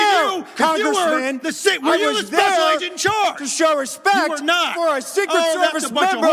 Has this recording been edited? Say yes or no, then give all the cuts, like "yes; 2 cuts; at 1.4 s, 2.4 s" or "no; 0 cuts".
no; 0 cuts